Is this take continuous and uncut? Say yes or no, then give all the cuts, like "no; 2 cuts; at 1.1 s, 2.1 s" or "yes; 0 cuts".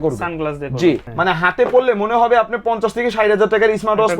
no; 1 cut; at 1.1 s